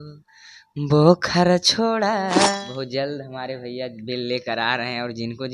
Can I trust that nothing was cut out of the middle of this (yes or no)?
no